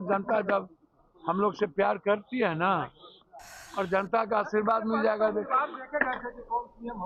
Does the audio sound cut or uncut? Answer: uncut